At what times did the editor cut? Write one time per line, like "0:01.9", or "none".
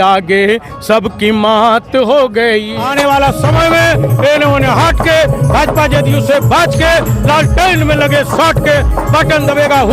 0:02.8